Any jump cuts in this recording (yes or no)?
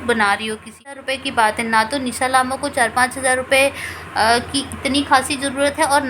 yes